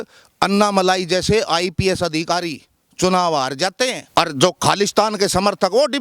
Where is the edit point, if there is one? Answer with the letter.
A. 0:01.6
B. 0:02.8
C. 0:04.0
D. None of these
C